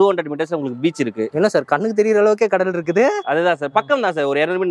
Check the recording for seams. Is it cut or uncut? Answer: uncut